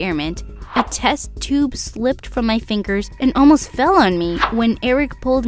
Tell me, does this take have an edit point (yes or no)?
no